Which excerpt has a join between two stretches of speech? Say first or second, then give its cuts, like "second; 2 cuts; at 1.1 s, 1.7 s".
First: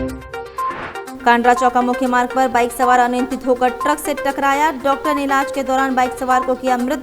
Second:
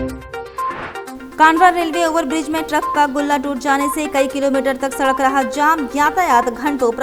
first; 1 cut; at 1.1 s